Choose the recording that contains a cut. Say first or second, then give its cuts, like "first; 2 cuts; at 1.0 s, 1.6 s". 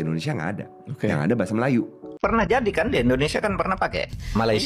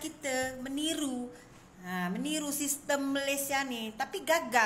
first; 1 cut; at 2.1 s